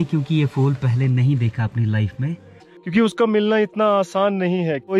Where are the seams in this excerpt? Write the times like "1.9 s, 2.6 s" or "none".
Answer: 2.7 s